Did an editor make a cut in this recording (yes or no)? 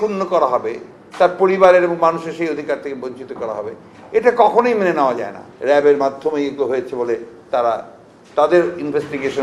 yes